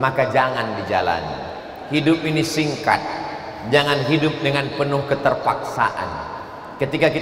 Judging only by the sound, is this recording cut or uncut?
uncut